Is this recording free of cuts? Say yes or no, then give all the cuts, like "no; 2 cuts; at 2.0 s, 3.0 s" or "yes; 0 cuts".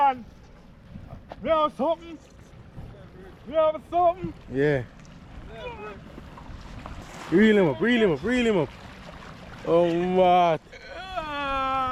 yes; 0 cuts